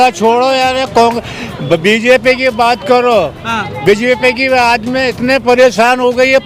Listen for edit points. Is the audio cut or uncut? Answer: uncut